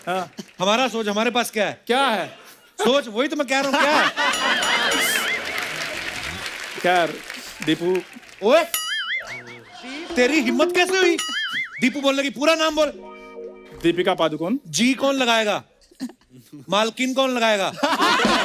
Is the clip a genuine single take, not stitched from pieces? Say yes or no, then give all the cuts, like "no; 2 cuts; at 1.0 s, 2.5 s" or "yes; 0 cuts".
yes; 0 cuts